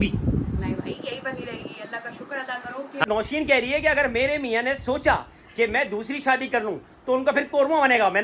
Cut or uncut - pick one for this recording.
cut